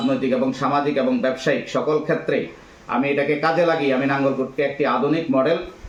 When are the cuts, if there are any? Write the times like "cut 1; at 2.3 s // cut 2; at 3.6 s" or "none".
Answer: none

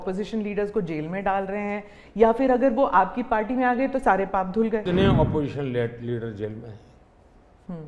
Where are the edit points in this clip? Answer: cut 1; at 4.8 s

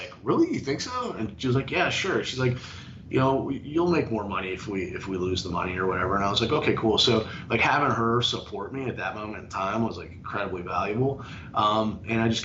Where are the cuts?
none

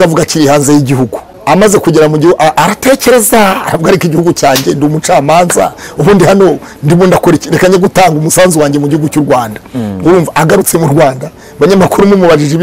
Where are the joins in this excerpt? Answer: cut 1; at 1.3 s

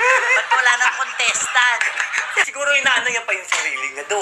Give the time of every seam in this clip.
cut 1; at 2.5 s

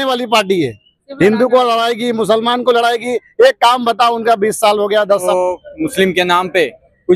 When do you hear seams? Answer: cut 1; at 5.2 s

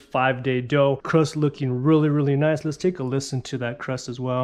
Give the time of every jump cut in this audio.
cut 1; at 1.0 s

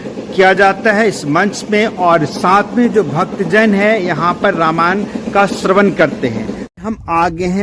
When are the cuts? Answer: cut 1; at 6.6 s

